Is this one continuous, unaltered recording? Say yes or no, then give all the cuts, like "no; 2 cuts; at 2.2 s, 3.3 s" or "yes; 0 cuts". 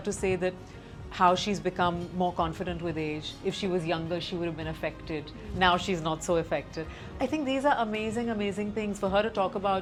yes; 0 cuts